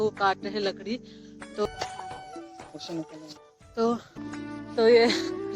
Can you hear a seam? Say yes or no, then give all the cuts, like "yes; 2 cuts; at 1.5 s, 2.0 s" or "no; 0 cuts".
yes; 2 cuts; at 1.7 s, 4.1 s